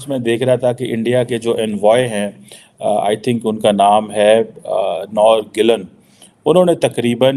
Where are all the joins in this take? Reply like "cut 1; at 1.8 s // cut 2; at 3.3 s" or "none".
none